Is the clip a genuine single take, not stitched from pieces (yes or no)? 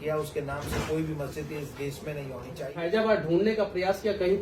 no